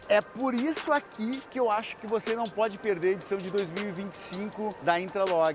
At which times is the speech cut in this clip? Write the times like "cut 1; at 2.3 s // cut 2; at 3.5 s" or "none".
cut 1; at 1.4 s // cut 2; at 4.8 s